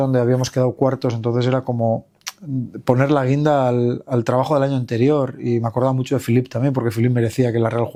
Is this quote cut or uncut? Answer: uncut